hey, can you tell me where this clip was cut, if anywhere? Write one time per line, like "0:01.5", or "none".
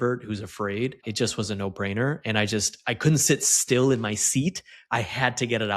0:01.1